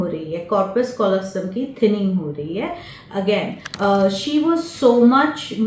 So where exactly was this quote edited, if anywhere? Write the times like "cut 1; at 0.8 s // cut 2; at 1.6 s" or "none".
cut 1; at 3.6 s